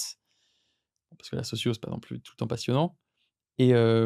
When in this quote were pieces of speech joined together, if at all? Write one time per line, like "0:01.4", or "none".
none